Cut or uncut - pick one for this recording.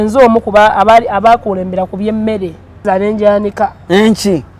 cut